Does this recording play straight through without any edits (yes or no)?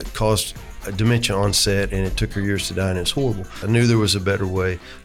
no